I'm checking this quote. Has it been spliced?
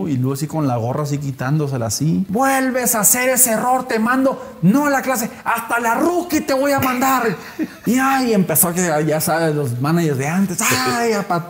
yes; 2 cuts; at 2.3 s, 7.8 s

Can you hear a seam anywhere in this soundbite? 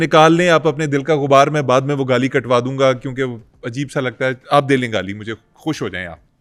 no; 0 cuts

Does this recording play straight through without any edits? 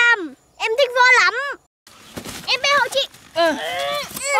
no; 1 cut; at 1.9 s

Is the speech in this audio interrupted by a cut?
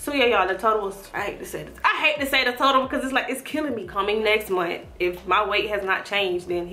yes; 2 cuts; at 1.0 s, 3.9 s

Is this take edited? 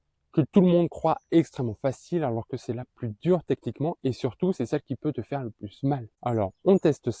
yes; 1 cut; at 6.1 s

